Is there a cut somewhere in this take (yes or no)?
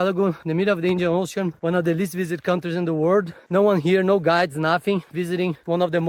no